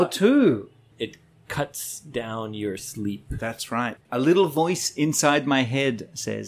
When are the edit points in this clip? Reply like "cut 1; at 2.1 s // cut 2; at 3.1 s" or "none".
cut 1; at 0.9 s // cut 2; at 4.0 s